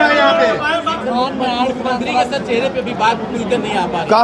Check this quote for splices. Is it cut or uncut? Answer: cut